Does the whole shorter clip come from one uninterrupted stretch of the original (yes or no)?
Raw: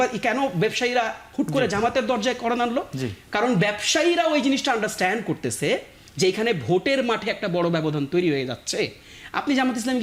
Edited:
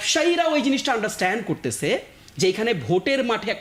yes